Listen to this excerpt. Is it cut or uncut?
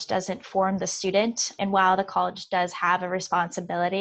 cut